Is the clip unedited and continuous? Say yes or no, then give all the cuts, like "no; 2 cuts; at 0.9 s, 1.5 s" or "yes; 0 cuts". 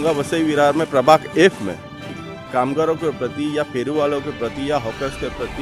yes; 0 cuts